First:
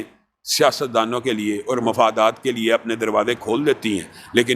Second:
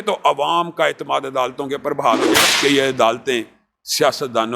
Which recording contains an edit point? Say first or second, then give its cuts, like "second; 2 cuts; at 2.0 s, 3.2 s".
second; 1 cut; at 2.4 s